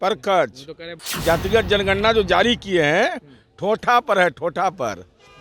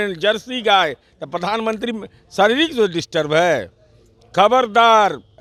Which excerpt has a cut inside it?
first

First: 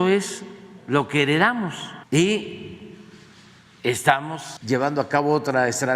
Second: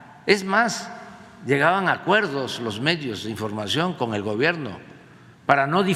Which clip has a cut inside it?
first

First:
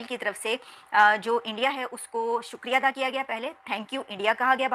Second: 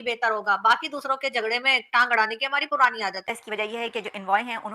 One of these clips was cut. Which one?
second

